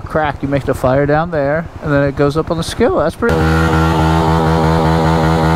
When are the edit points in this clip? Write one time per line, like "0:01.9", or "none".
0:03.3